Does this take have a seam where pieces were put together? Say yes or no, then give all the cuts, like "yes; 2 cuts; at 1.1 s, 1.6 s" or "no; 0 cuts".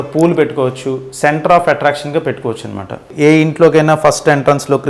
yes; 1 cut; at 3.1 s